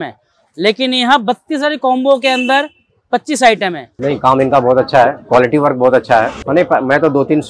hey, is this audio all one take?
no; 2 cuts; at 3.9 s, 6.4 s

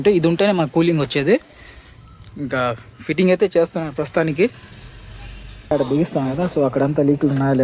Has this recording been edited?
yes; 1 cut; at 5.7 s

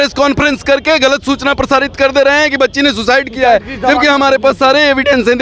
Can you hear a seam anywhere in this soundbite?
no; 0 cuts

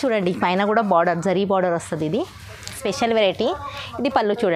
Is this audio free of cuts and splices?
no; 1 cut; at 2.8 s

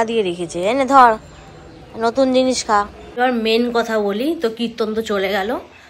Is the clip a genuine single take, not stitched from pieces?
no; 1 cut; at 3.0 s

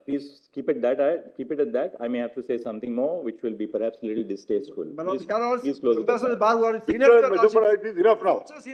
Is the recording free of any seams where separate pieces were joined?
yes; 0 cuts

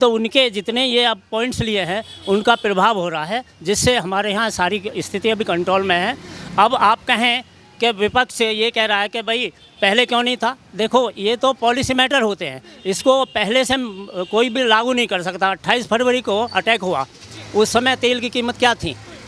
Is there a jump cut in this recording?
no; 0 cuts

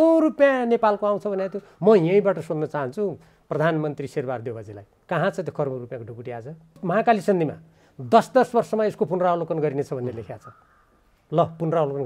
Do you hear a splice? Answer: yes; 1 cut; at 6.8 s

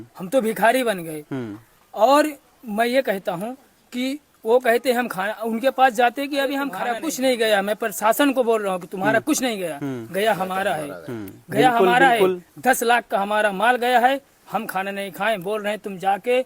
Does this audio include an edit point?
yes; 1 cut; at 6.8 s

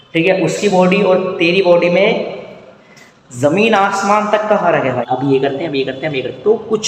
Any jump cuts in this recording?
yes; 1 cut; at 5.1 s

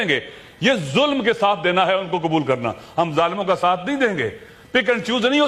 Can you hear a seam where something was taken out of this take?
no; 0 cuts

